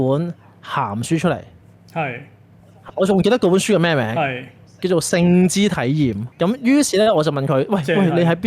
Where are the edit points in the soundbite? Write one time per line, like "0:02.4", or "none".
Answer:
0:06.2

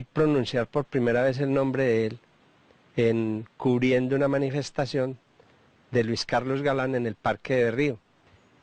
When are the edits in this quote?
none

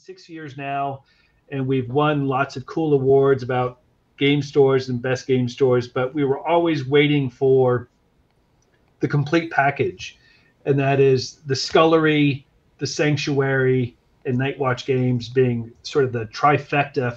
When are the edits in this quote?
none

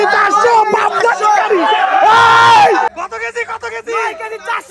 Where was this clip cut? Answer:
0:02.9

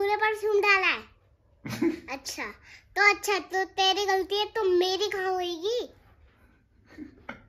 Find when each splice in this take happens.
none

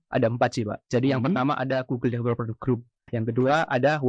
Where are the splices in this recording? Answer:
0:03.1

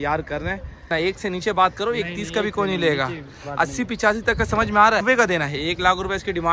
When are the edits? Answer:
0:00.9
0:05.0

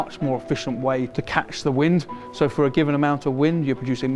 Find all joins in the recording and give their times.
0:01.1
0:02.2

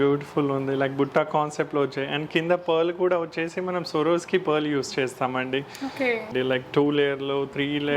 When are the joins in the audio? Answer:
0:06.3

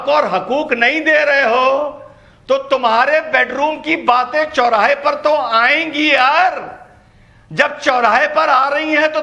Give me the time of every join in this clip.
none

